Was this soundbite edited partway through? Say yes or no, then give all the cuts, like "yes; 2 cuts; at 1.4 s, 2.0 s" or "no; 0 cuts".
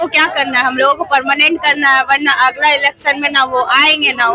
no; 0 cuts